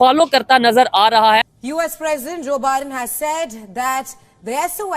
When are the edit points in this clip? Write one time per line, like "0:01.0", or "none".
0:01.5